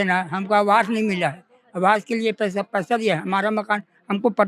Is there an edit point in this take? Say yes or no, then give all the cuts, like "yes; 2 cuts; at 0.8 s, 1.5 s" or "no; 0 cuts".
no; 0 cuts